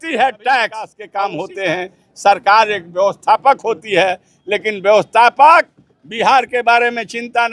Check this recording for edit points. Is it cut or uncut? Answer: cut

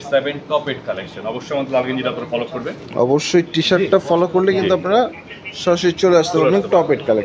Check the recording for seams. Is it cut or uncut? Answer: uncut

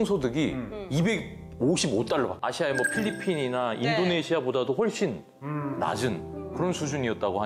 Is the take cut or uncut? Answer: cut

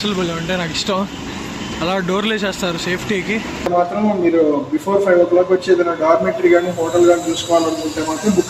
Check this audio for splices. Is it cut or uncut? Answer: cut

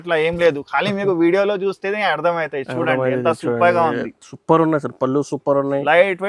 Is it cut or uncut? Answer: uncut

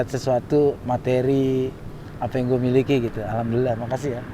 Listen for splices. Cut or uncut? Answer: uncut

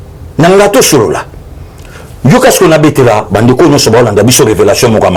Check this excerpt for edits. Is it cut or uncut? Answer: uncut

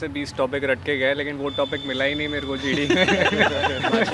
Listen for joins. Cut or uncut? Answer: uncut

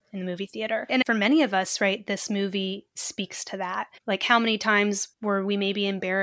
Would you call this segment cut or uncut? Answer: cut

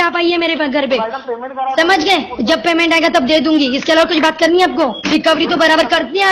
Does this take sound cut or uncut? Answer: cut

